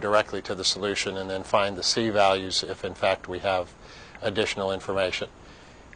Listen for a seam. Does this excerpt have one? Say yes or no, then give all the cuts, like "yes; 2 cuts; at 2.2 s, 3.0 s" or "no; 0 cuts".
no; 0 cuts